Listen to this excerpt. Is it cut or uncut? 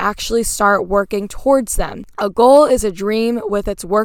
cut